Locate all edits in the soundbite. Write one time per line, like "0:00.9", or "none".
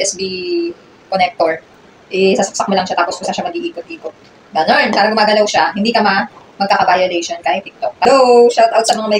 0:08.0